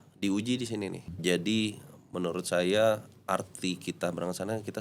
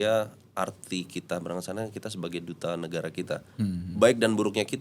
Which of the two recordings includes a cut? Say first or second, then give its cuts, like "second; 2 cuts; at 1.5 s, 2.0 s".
first; 1 cut; at 1.1 s